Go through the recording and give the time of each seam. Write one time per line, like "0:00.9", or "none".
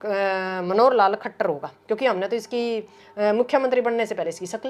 none